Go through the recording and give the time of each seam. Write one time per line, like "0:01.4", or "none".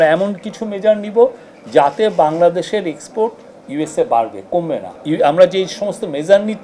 0:04.9